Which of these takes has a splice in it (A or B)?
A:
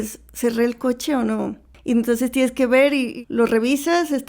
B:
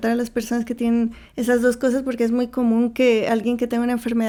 A